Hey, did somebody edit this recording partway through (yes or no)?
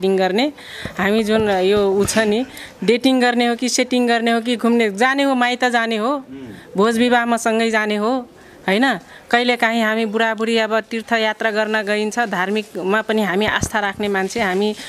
no